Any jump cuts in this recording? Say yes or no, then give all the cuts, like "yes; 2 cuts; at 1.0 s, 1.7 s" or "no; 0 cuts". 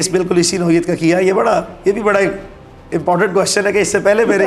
no; 0 cuts